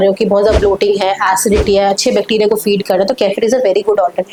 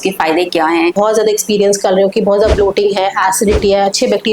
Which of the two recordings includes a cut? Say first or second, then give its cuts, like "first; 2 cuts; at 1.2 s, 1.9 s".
second; 1 cut; at 0.9 s